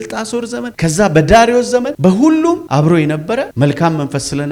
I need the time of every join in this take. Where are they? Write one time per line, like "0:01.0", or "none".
none